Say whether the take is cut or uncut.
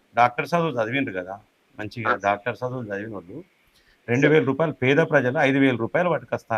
uncut